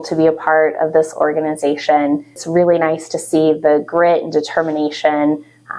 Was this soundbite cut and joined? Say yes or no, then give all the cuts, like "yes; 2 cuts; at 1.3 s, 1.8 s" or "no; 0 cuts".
yes; 1 cut; at 2.4 s